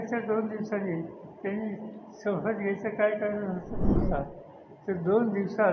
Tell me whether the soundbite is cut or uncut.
cut